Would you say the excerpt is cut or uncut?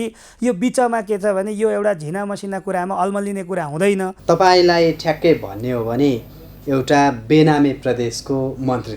cut